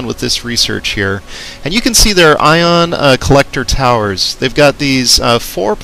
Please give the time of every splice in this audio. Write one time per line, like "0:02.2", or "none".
none

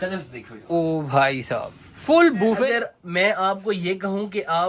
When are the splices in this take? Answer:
0:02.7

